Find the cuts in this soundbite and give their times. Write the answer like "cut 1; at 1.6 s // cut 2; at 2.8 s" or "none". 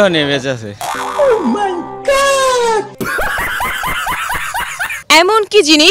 cut 1; at 4.9 s